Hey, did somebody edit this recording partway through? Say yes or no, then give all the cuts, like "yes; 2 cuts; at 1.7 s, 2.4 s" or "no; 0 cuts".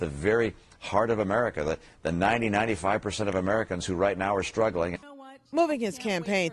yes; 1 cut; at 3.1 s